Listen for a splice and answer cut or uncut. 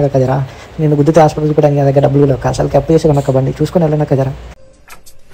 uncut